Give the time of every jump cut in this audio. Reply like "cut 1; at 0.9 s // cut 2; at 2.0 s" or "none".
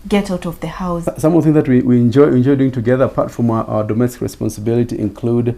cut 1; at 1.0 s